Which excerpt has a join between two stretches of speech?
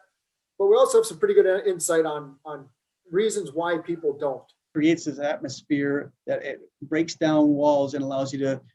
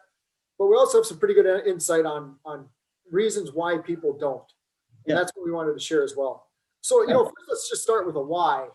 first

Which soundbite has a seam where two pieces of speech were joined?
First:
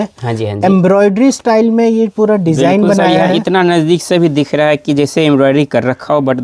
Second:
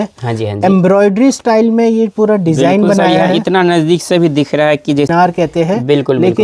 second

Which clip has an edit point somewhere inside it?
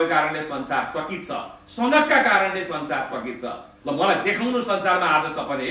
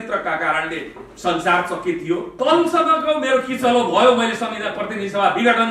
second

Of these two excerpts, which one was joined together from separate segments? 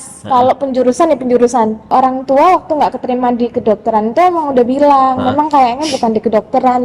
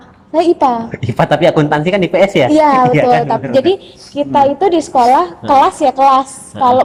first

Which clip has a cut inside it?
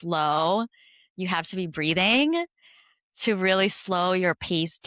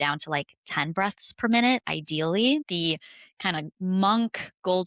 second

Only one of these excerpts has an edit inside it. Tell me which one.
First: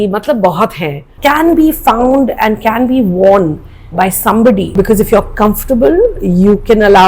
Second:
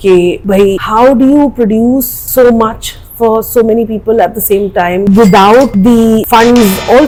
first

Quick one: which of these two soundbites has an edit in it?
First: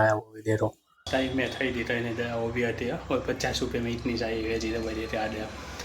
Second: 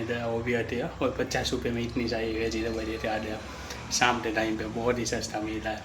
first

